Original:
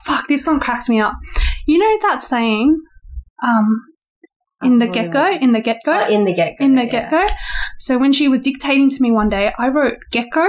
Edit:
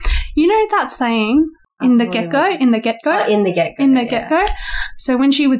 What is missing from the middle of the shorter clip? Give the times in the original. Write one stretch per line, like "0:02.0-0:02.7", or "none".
0:02.9-0:04.4